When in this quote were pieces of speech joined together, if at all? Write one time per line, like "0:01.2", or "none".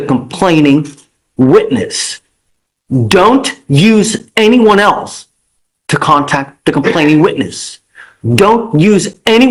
none

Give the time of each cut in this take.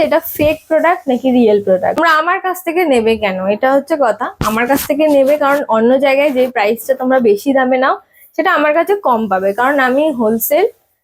0:02.0

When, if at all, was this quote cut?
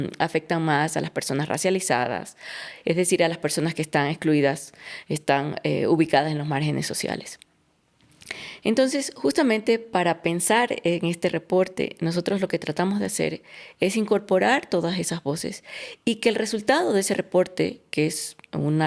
none

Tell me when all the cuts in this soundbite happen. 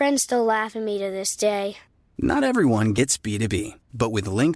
none

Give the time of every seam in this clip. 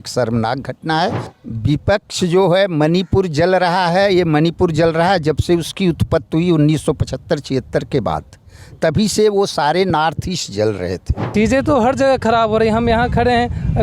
0:01.2
0:11.2

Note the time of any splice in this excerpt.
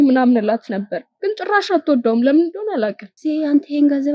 0:03.2

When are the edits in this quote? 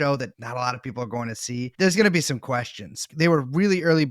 0:03.0

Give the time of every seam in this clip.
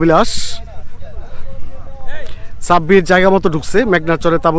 none

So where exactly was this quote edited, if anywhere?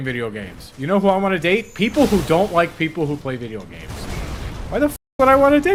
none

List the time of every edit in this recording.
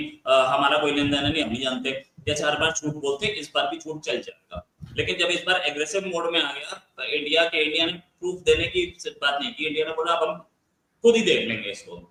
none

